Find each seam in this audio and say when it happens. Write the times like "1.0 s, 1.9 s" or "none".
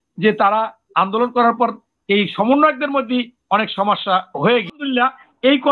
4.8 s